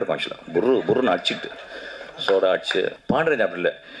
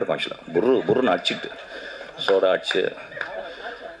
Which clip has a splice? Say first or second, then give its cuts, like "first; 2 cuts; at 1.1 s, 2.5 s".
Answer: first; 1 cut; at 3.0 s